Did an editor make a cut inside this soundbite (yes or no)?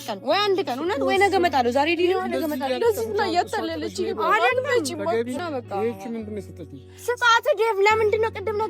yes